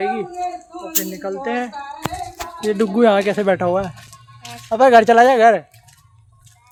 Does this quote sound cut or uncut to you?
uncut